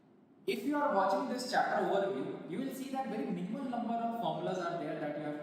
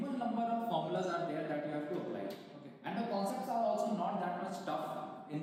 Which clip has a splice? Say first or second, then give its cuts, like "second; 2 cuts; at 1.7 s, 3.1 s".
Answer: first; 1 cut; at 2.4 s